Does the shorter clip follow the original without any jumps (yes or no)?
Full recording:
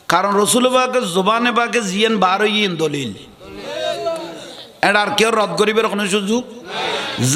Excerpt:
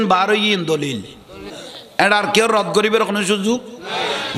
no